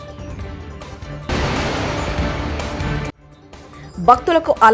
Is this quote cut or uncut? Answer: cut